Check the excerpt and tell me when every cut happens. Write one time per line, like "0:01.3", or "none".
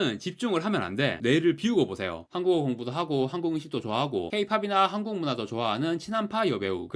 0:01.2
0:02.2